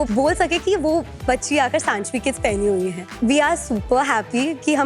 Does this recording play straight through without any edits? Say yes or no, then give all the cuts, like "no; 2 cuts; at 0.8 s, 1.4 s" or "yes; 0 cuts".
no; 1 cut; at 3.0 s